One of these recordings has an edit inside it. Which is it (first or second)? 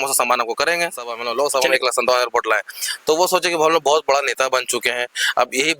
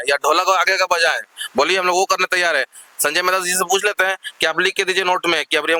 first